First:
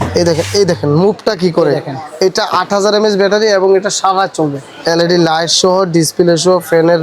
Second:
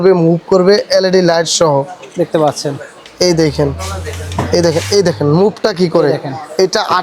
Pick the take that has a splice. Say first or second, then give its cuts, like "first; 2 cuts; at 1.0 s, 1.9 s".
first; 1 cut; at 4.7 s